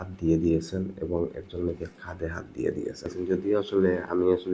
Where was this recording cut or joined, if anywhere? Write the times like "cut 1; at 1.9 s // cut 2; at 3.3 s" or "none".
cut 1; at 3.1 s